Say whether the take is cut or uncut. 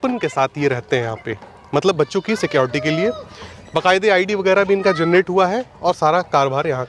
uncut